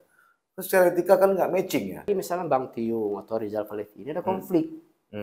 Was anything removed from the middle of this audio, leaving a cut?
yes; 1 cut; at 2.1 s

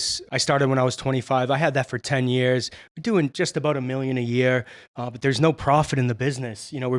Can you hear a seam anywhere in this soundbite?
no; 0 cuts

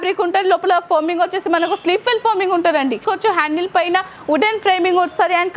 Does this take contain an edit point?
yes; 1 cut; at 3.0 s

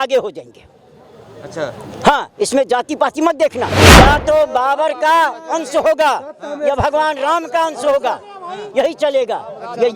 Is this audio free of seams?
no; 1 cut; at 3.8 s

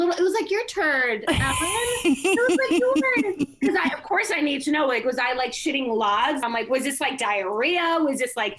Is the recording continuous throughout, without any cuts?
no; 1 cut; at 6.4 s

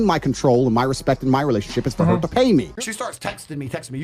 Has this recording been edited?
yes; 1 cut; at 2.8 s

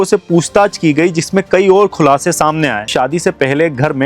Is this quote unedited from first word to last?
no; 1 cut; at 2.8 s

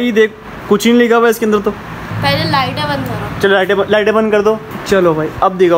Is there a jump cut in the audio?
yes; 2 cuts; at 2.0 s, 4.7 s

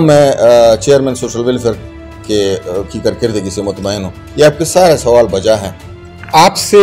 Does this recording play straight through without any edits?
yes; 0 cuts

